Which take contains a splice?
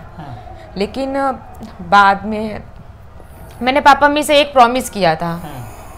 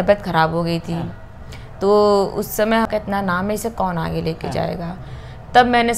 second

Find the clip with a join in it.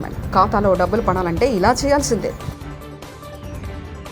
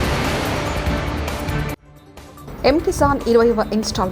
second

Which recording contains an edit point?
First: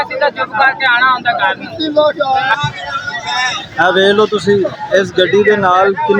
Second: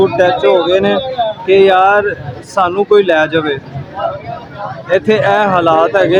first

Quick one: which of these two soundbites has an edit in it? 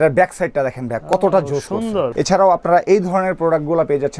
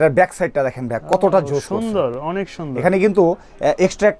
first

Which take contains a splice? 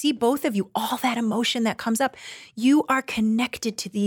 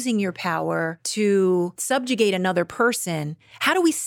second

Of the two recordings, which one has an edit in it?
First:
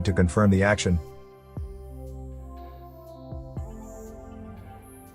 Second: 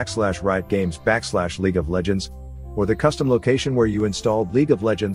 first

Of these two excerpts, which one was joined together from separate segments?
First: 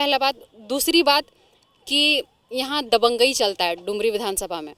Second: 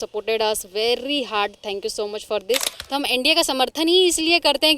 second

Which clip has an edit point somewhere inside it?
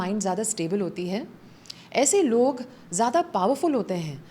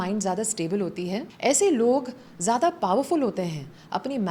second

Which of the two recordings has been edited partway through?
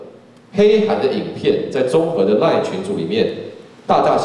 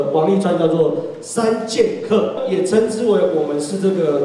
second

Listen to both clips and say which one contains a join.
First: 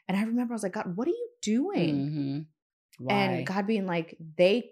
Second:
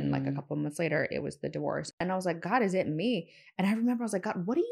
second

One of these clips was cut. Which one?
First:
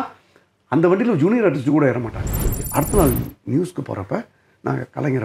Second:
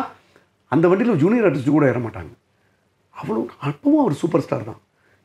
first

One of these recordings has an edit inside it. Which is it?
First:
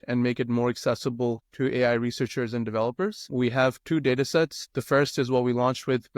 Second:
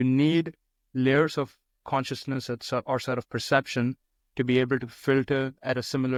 first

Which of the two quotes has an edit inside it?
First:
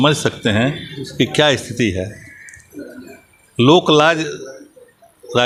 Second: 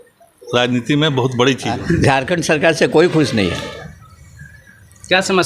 second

